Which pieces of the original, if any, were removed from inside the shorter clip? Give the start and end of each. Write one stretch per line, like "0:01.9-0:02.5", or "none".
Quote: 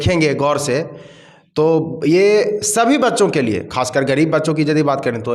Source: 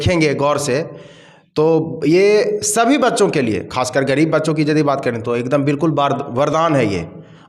none